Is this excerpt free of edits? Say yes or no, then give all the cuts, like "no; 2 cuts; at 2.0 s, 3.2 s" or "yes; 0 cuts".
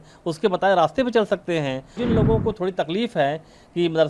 no; 1 cut; at 2.0 s